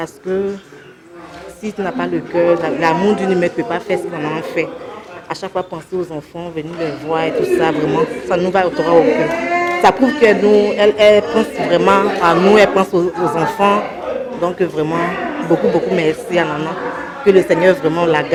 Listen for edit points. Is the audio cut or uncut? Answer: uncut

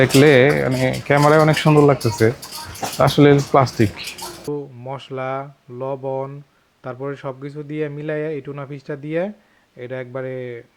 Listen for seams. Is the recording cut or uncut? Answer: cut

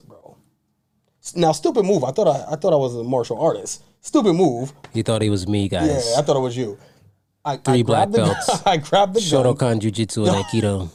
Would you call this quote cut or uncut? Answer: uncut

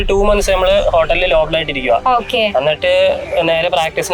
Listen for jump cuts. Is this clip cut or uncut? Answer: uncut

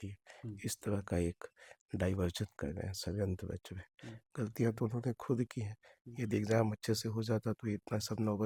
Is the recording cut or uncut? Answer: uncut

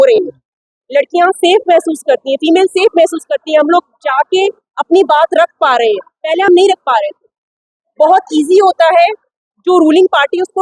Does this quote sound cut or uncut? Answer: uncut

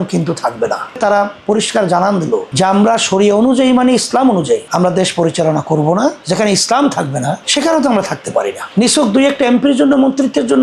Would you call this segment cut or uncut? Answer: cut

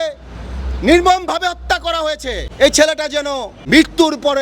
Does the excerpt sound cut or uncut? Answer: cut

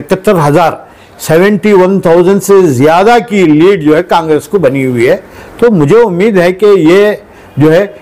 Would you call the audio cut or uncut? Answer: uncut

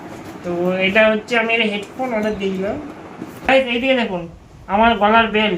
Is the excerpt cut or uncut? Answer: cut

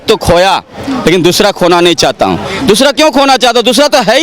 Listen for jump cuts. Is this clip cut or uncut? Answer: uncut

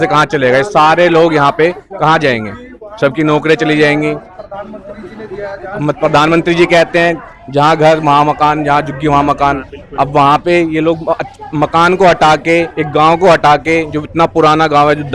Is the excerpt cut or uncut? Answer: uncut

